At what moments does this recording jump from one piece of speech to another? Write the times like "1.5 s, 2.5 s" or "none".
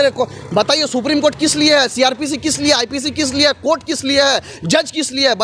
none